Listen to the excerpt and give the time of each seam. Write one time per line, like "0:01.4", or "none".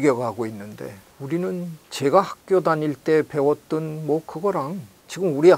0:01.1
0:01.8